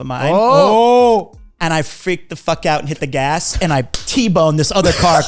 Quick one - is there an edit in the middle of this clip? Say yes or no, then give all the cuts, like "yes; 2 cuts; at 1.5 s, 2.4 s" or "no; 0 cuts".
no; 0 cuts